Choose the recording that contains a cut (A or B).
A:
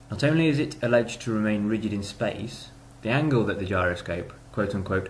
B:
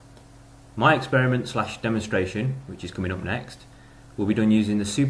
A